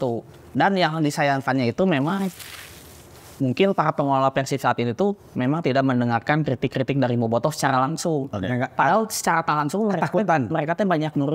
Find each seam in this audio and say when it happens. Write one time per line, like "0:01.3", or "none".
none